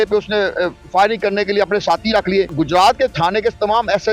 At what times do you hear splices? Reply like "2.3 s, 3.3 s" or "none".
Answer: 2.5 s